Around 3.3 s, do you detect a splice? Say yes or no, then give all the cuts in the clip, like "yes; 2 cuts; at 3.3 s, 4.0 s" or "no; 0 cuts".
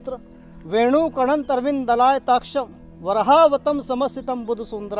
no; 0 cuts